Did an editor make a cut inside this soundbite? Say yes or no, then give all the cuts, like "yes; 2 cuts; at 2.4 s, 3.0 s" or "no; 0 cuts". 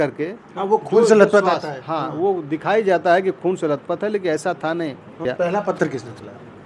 yes; 1 cut; at 5.2 s